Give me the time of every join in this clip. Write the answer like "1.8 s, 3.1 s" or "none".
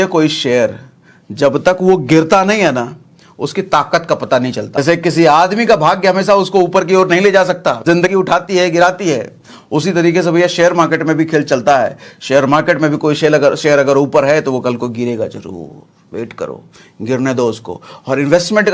4.8 s, 8.1 s